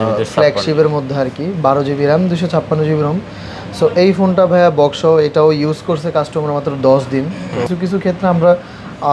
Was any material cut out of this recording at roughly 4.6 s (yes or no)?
no